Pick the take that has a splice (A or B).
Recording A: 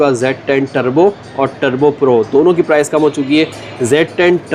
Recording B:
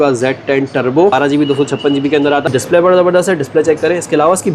B